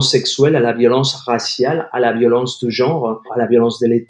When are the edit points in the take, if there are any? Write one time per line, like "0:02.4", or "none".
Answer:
0:03.2